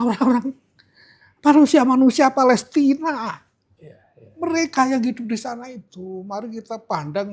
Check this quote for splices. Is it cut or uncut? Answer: uncut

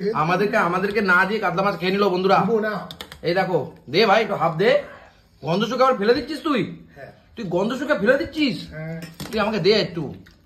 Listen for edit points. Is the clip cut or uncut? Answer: uncut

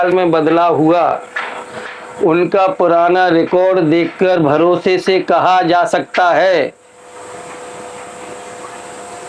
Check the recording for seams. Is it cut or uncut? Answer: uncut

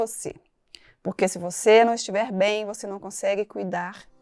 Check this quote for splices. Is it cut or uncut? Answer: uncut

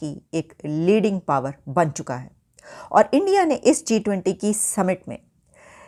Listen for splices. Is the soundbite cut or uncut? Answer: uncut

